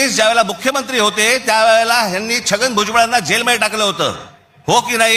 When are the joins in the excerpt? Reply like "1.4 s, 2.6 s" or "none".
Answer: none

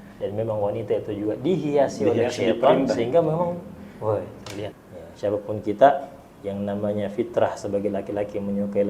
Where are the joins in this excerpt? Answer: 4.7 s

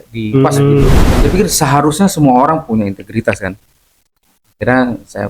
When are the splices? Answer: 1.1 s

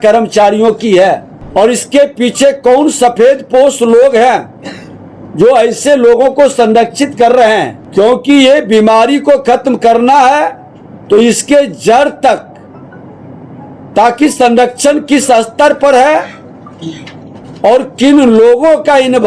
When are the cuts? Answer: 1.3 s, 7.8 s

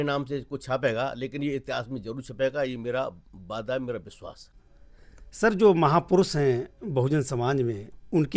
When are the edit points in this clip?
none

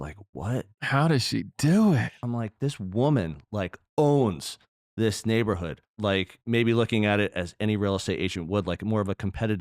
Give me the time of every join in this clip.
2.1 s, 6.0 s

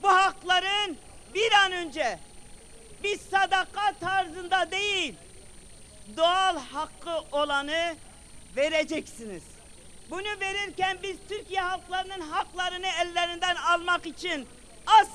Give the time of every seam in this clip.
5.9 s

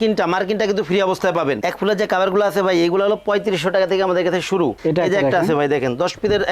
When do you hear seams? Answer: 1.6 s, 4.8 s

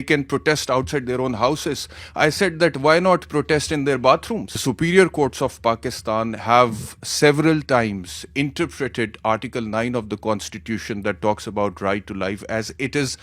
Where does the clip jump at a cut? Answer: 4.6 s

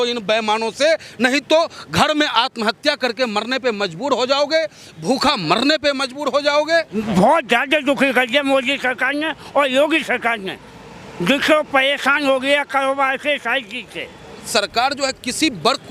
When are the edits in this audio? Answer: 7.0 s, 14.5 s

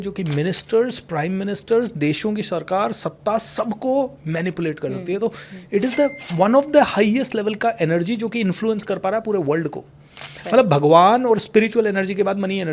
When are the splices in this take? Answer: none

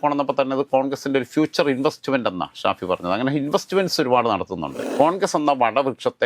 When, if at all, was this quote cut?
4.8 s

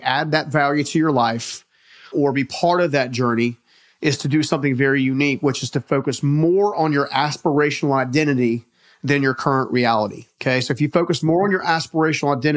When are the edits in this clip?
2.1 s, 10.3 s

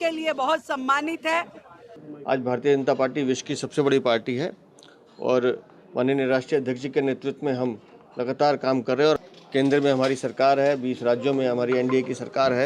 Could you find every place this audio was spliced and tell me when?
2.0 s, 9.2 s

